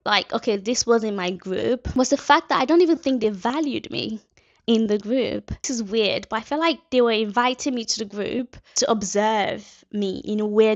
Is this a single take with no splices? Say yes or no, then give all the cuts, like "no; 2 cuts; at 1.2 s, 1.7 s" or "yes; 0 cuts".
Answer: no; 2 cuts; at 5.7 s, 8.6 s